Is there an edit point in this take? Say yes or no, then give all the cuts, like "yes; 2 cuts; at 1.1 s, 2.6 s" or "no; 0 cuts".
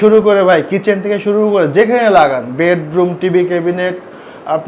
no; 0 cuts